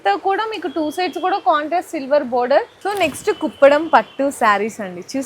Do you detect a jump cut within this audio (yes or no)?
yes